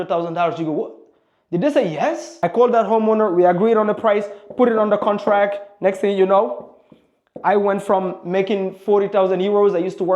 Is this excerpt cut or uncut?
cut